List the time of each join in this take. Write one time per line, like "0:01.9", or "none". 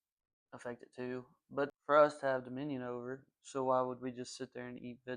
0:01.7